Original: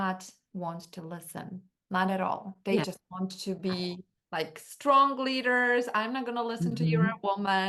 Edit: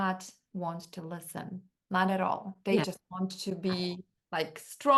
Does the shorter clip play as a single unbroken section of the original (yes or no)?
yes